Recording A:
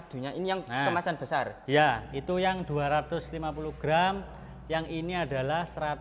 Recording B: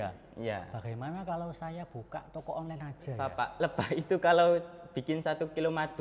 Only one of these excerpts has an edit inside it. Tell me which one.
B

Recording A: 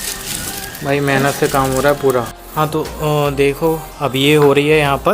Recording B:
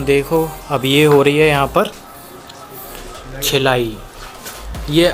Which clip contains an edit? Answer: A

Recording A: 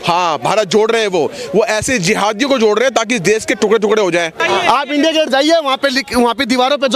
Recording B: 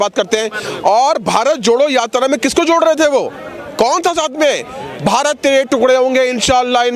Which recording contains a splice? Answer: A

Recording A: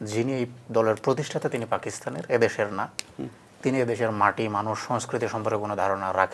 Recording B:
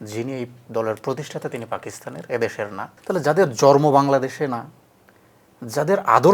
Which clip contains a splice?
B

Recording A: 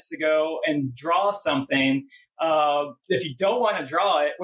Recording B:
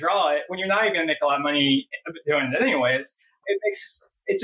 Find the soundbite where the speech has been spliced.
B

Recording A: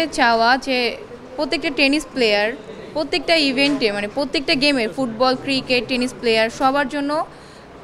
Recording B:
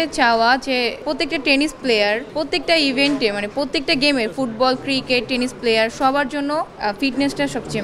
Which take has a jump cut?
B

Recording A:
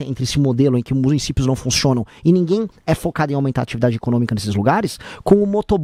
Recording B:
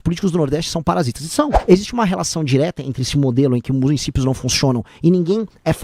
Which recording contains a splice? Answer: B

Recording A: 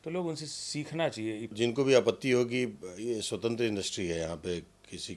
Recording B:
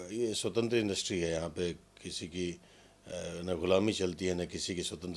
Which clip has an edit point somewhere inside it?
A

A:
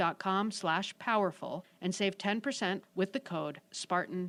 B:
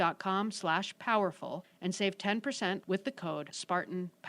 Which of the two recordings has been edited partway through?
B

